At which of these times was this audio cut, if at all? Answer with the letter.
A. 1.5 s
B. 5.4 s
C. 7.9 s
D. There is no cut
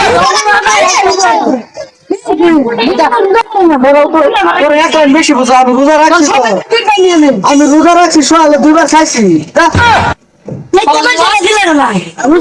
D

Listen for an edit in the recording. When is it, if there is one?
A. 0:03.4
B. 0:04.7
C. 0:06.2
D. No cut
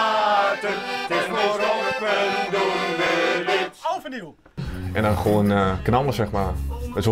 B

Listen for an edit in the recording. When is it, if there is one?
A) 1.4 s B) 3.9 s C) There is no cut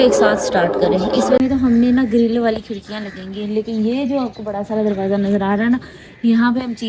A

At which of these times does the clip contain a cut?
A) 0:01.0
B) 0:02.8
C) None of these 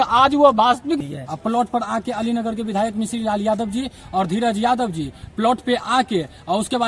A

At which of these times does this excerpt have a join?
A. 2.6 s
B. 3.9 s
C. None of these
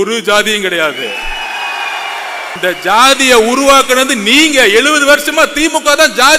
A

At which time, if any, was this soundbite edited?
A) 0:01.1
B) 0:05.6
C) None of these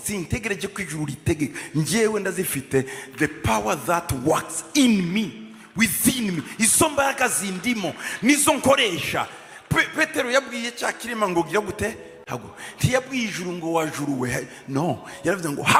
C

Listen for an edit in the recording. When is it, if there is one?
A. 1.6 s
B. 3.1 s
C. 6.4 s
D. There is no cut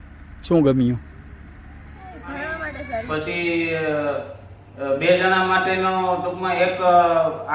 B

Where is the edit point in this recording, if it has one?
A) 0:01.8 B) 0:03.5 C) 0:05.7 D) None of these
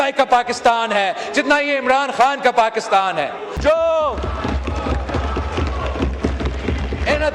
B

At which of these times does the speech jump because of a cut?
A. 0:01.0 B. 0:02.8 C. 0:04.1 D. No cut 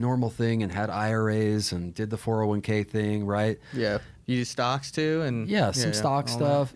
C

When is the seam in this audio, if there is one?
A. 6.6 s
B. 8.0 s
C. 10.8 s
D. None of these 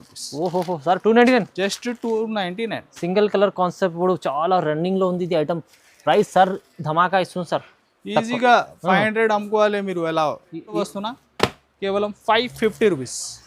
C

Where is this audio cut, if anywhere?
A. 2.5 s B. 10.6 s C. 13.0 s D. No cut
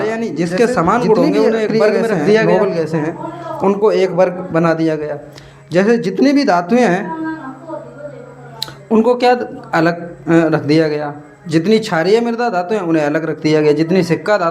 A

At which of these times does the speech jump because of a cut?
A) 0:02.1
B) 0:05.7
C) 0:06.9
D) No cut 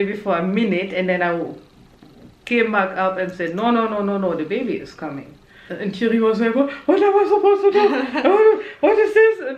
B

